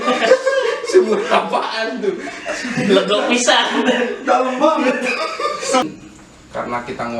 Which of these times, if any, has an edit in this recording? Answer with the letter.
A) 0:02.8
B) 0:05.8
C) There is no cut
B